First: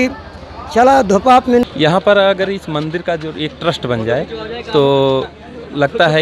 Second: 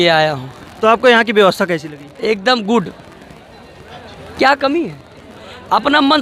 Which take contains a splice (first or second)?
first